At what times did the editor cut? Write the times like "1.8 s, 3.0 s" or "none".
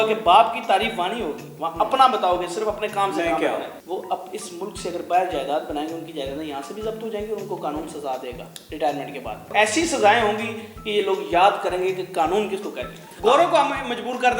3.8 s, 9.5 s, 13.0 s

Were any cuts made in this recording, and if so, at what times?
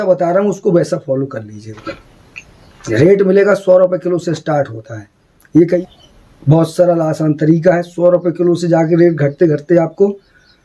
1.7 s, 5.8 s

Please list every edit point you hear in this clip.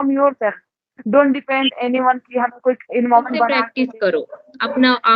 3.6 s

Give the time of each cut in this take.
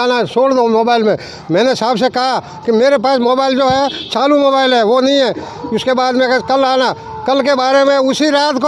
none

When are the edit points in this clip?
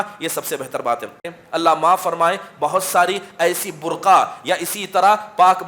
1.2 s

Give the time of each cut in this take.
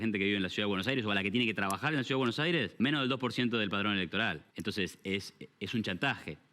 2.9 s, 4.5 s

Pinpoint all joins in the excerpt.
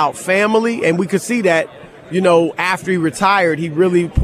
none

